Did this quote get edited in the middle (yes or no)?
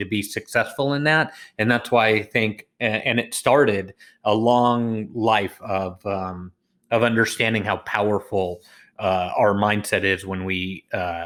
no